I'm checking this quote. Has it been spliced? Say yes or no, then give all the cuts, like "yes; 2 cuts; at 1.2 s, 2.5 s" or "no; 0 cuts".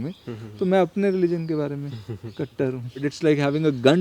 yes; 1 cut; at 3.0 s